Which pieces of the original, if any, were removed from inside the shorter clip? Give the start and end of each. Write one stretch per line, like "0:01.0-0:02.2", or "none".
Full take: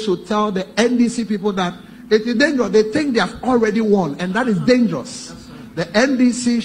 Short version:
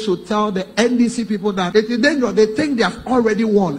0:01.6-0:02.0